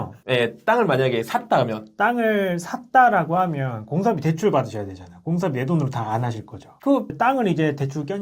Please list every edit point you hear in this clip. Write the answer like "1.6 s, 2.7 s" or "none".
7.1 s